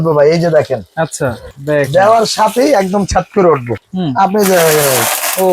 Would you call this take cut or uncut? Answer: cut